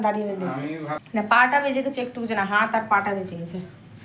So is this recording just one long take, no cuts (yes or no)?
no